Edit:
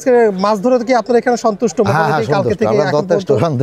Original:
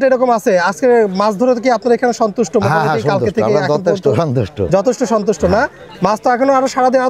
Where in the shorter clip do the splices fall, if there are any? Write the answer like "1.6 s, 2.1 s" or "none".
none

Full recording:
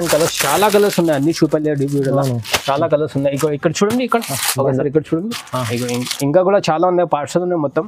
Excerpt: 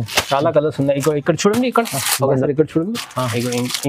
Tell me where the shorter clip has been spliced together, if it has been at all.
none

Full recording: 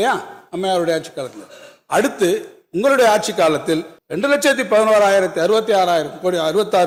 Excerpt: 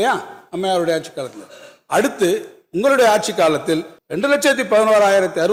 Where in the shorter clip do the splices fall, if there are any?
none

